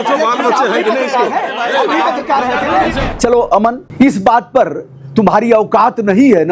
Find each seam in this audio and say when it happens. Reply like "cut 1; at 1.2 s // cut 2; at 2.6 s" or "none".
cut 1; at 3.1 s // cut 2; at 3.8 s